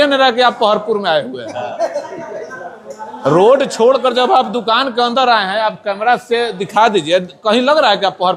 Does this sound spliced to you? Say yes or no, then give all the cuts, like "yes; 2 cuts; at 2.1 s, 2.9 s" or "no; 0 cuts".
no; 0 cuts